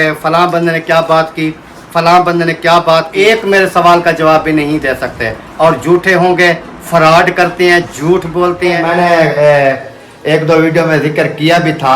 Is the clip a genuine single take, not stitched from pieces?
no; 2 cuts; at 3.1 s, 8.8 s

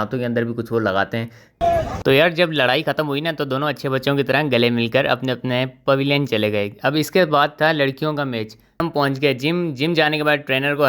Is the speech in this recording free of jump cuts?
no; 2 cuts; at 1.6 s, 8.8 s

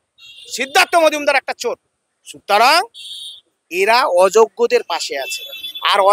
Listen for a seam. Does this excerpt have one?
no; 0 cuts

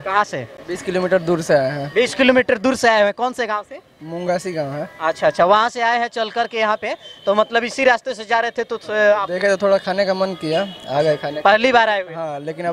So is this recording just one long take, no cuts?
yes; 0 cuts

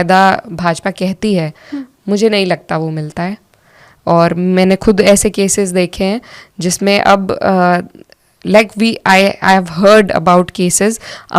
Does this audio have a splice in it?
no; 0 cuts

